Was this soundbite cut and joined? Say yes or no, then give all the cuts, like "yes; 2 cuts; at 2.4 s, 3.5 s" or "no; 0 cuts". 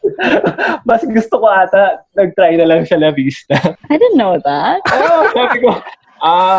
yes; 1 cut; at 3.7 s